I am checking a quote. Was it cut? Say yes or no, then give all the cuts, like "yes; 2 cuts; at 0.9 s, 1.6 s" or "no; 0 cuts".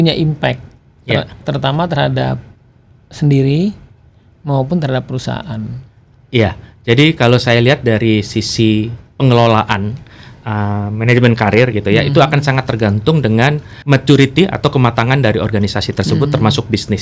no; 0 cuts